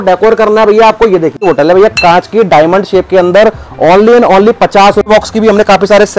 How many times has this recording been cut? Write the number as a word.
two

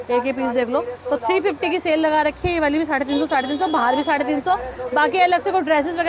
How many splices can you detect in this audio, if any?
zero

